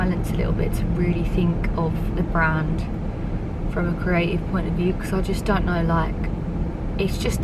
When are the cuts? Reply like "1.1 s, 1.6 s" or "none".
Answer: none